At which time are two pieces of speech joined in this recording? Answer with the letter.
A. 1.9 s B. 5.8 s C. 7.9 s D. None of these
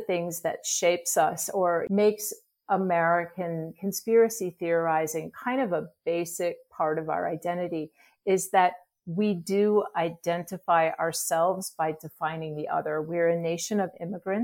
A